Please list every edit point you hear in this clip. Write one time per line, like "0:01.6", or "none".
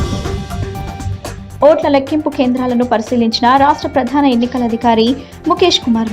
0:01.4